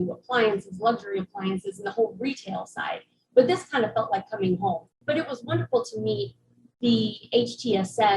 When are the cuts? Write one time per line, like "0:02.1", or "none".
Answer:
0:05.0